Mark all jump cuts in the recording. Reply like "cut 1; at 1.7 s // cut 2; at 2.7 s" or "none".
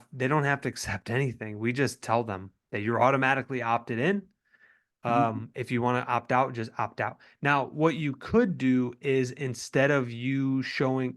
none